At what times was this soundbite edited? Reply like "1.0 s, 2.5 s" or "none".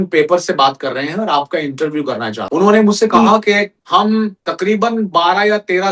2.3 s, 3.8 s, 4.4 s